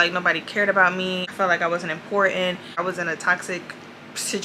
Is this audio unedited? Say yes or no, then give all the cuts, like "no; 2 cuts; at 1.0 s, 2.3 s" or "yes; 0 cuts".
no; 2 cuts; at 1.3 s, 2.8 s